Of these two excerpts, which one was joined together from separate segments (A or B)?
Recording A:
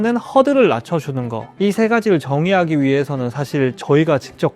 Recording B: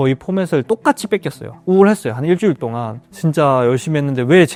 A